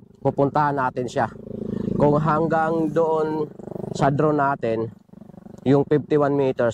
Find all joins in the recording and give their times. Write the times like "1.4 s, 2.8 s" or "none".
none